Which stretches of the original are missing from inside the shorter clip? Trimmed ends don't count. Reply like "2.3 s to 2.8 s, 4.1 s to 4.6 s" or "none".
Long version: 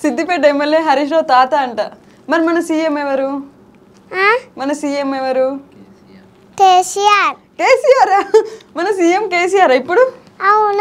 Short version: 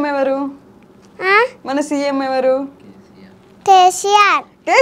none